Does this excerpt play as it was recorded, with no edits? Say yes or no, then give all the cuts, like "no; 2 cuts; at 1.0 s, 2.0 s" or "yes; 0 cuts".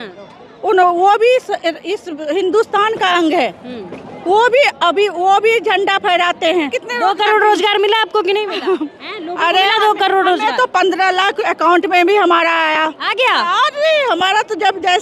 no; 1 cut; at 6.8 s